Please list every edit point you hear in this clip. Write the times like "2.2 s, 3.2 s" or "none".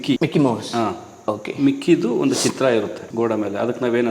3.1 s